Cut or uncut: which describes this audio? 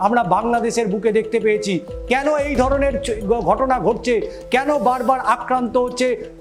uncut